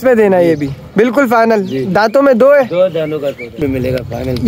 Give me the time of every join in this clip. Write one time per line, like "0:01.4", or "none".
0:03.6

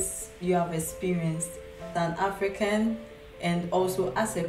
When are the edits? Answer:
0:01.9

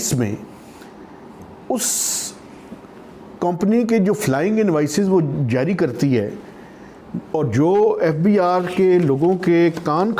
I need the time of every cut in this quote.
none

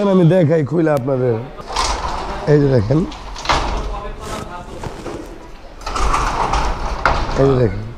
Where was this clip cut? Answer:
0:01.5

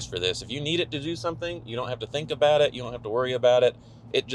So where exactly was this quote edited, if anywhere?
none

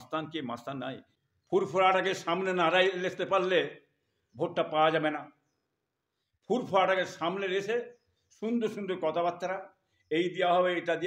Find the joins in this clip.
0:01.1

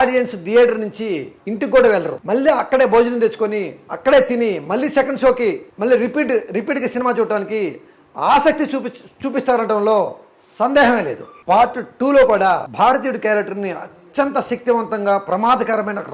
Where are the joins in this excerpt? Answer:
0:11.4
0:12.7

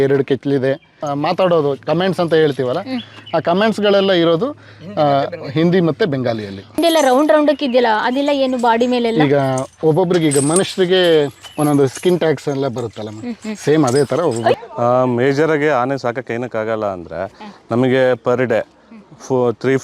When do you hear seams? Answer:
0:01.0
0:06.8
0:14.6

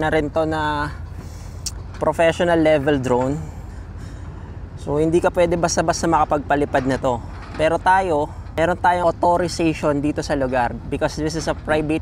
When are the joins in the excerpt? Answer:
0:08.9

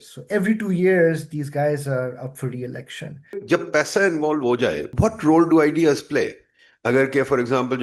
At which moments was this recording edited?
0:03.4
0:04.9

